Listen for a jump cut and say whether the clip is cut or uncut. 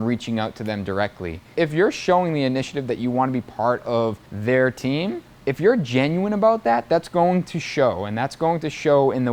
cut